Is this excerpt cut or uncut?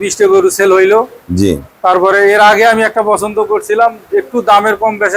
uncut